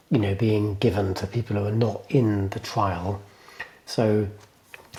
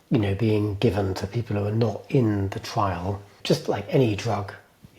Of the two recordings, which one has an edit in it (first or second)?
second